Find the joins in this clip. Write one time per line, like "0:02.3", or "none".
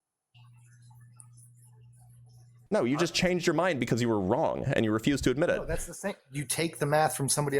0:02.5